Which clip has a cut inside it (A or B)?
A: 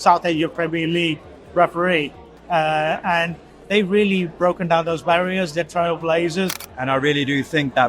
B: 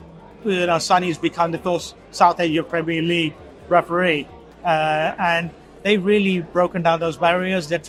A